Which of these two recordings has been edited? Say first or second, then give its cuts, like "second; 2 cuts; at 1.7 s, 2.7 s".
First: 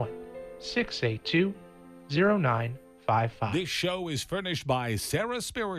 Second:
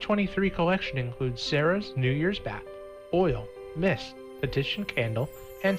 first; 1 cut; at 3.5 s